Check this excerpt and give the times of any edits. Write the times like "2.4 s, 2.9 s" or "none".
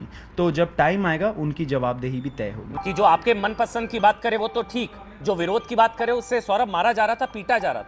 2.5 s